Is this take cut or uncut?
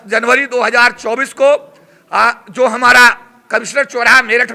uncut